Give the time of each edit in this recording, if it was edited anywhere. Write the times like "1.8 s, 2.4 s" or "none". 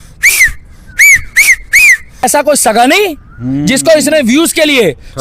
2.2 s